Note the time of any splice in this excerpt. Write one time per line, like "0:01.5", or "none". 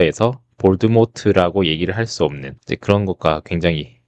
none